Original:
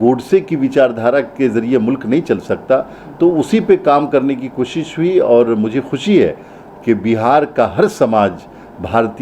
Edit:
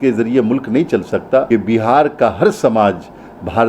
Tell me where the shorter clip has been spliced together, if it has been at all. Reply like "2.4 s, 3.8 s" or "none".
1.5 s